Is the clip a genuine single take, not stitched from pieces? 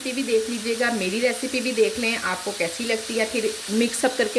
yes; 0 cuts

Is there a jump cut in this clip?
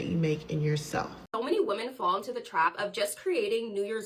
yes; 1 cut; at 1.2 s

